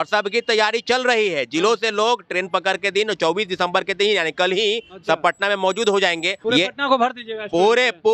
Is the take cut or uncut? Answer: cut